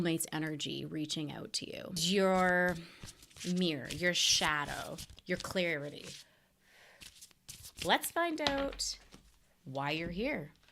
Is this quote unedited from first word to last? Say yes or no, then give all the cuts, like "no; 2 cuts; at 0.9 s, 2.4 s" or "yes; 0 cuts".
no; 1 cut; at 2.0 s